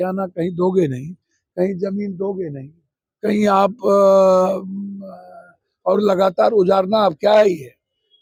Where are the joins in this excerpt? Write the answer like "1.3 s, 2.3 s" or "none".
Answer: none